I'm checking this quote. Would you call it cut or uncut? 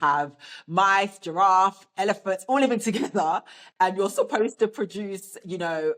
uncut